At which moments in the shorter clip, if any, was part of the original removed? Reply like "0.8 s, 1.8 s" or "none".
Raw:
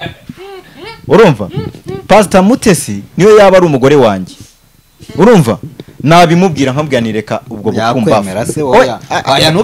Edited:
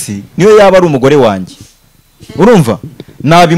none